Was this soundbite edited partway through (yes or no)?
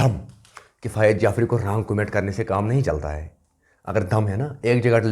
no